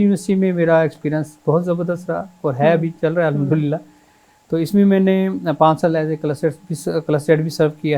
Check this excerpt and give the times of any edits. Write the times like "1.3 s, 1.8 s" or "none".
none